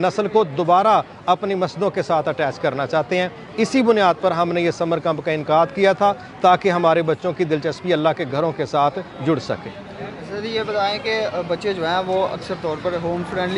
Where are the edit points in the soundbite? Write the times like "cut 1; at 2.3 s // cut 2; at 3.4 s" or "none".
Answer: none